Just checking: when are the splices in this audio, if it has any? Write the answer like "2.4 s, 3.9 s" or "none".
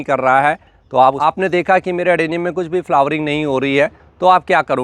1.2 s